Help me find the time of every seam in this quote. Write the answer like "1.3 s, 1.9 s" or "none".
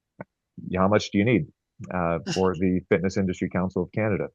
none